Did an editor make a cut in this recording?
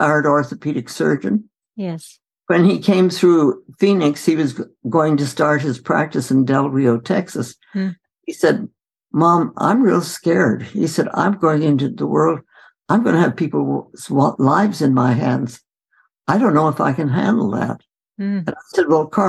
no; 0 cuts

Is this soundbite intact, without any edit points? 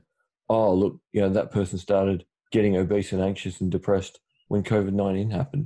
no; 2 cuts; at 2.3 s, 4.4 s

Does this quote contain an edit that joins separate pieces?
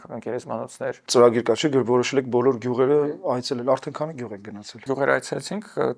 yes; 2 cuts; at 1.0 s, 4.8 s

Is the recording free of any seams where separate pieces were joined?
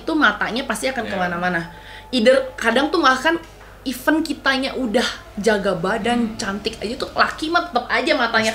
yes; 0 cuts

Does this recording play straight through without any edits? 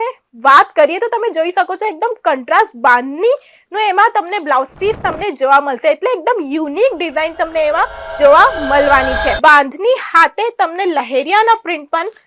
no; 1 cut; at 9.3 s

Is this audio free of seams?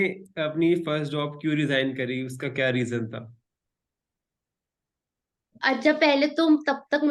yes; 0 cuts

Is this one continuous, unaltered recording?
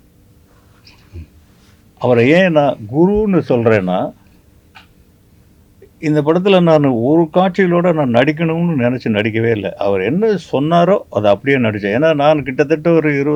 yes; 0 cuts

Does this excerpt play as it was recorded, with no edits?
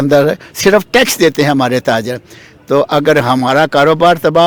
yes; 0 cuts

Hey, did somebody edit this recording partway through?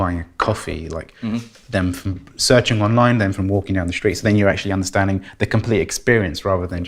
no; 0 cuts

